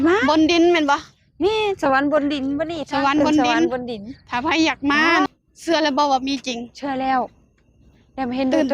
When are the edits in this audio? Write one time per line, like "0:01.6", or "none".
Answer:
0:05.3